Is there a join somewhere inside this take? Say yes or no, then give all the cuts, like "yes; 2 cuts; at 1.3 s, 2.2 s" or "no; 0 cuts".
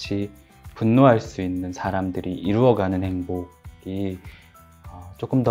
no; 0 cuts